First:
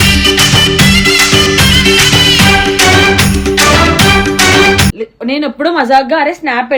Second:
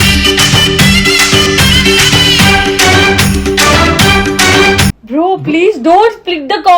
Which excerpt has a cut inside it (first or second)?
second